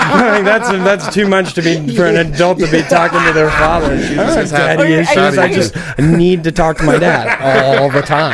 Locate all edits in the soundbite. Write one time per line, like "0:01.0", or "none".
0:04.0